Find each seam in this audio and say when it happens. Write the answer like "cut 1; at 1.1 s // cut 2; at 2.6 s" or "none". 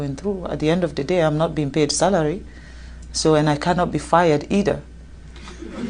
none